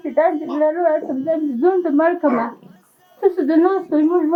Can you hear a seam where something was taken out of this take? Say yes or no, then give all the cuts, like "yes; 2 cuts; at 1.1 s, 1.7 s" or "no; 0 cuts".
no; 0 cuts